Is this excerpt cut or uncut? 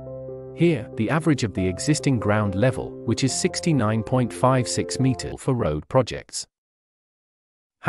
cut